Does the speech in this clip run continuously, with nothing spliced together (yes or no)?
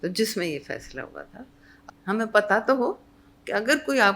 no